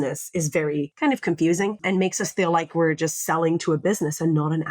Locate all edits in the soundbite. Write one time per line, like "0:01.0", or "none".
0:00.9
0:01.8